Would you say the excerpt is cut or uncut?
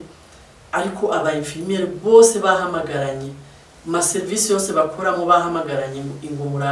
uncut